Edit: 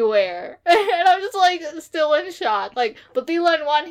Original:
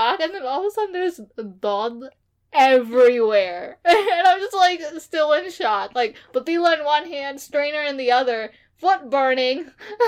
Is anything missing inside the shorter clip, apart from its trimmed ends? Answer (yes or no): no